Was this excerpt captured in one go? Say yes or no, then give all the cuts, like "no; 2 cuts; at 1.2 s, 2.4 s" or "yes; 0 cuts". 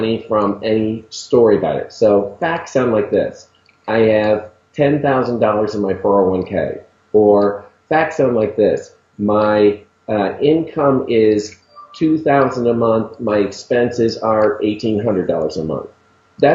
yes; 0 cuts